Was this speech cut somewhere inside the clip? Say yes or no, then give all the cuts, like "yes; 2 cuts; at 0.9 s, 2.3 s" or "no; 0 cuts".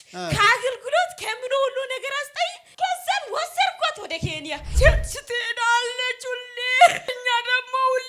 yes; 2 cuts; at 4.7 s, 7.2 s